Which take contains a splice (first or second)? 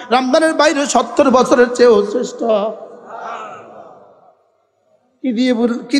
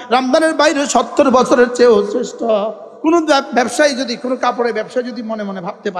second